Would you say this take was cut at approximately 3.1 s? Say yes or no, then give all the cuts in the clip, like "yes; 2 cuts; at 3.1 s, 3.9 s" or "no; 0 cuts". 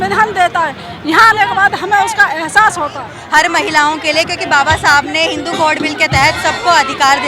yes; 1 cut; at 3.1 s